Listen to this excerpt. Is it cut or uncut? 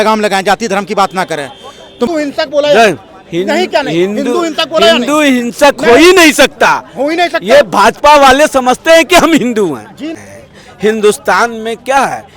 cut